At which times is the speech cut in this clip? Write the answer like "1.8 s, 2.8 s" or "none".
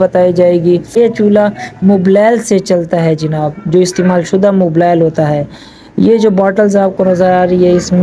1.0 s